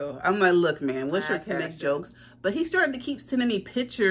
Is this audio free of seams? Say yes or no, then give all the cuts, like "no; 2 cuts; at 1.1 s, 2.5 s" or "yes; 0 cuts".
no; 1 cut; at 1.5 s